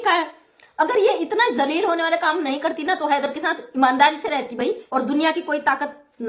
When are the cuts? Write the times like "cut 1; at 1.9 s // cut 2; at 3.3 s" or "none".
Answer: cut 1; at 4.8 s